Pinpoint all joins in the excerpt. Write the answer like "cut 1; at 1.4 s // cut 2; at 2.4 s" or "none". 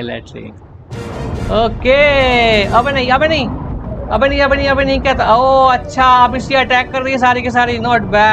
none